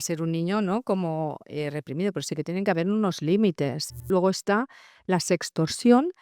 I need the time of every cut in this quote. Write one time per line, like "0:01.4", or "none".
0:04.0